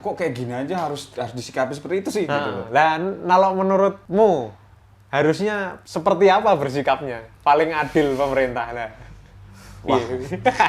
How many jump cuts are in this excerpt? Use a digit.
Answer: 2